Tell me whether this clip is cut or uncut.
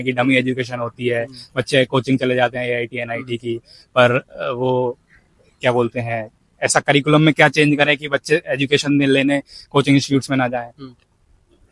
uncut